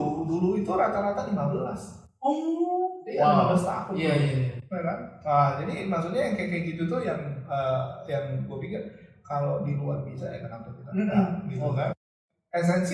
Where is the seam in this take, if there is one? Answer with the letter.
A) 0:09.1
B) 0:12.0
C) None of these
B